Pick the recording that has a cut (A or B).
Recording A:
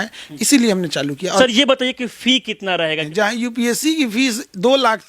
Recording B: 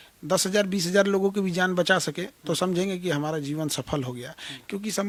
A